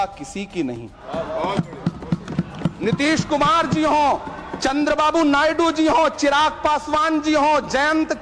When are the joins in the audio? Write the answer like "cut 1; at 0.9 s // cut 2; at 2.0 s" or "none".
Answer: cut 1; at 1.0 s